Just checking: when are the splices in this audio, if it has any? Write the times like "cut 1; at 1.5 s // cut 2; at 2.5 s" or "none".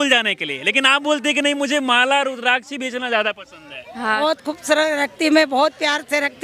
cut 1; at 4.2 s